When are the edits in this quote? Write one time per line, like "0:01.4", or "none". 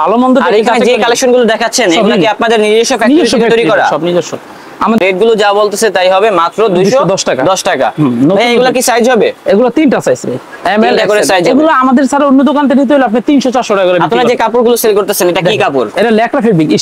0:05.0

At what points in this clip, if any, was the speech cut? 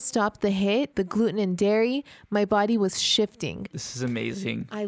0:00.9
0:03.7

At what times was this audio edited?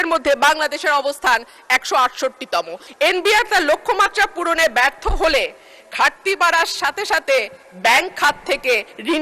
0:02.8

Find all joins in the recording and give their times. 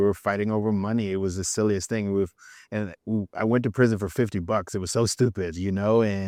none

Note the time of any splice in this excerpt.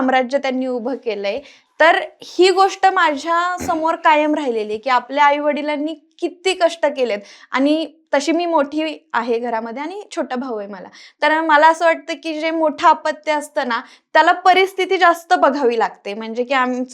none

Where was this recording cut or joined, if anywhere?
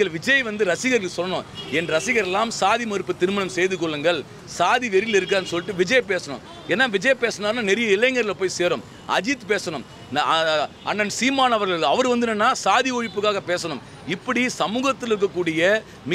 none

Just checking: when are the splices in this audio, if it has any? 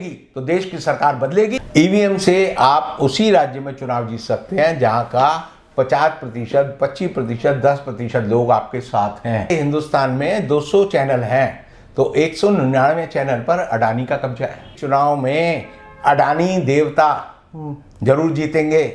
0:01.6
0:09.5
0:14.7

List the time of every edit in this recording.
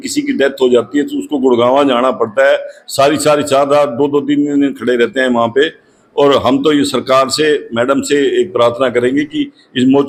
none

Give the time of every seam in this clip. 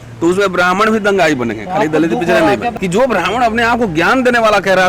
0:02.7

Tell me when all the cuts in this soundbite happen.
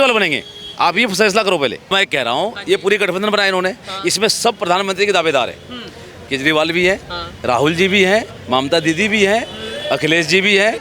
0:01.9

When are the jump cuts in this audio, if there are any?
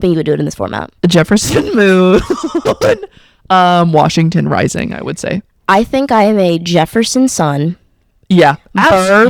none

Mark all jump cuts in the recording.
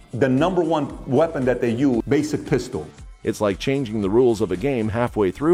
none

